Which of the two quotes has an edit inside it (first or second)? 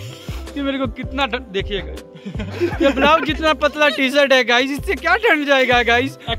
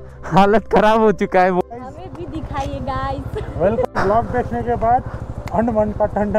second